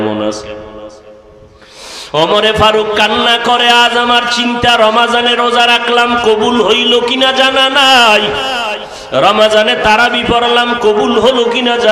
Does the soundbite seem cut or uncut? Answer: uncut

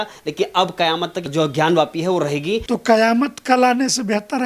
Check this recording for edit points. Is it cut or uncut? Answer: cut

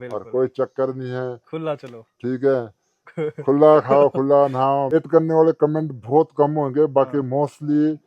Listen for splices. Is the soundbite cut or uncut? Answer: cut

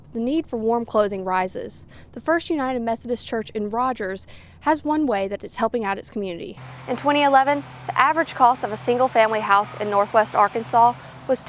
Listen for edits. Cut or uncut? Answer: cut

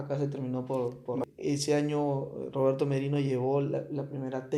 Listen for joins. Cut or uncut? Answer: cut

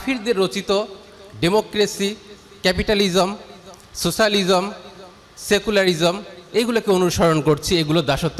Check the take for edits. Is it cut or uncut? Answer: uncut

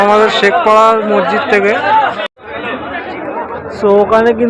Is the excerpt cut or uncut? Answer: cut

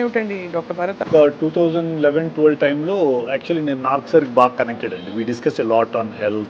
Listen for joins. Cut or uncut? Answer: cut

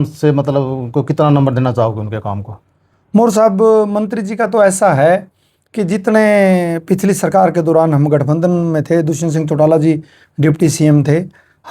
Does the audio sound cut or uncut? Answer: uncut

